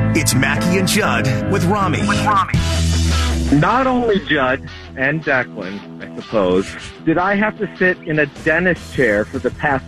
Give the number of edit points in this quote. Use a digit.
1